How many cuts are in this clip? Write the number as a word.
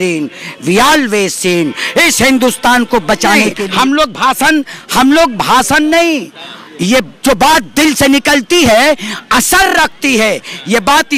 one